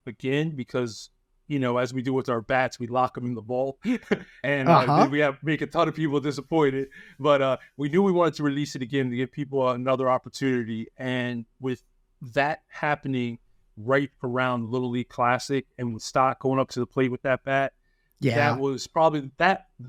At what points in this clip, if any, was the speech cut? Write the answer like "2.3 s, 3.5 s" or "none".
none